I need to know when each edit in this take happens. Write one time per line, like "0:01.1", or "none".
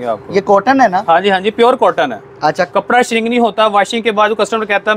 none